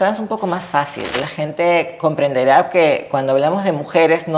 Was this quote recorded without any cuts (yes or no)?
no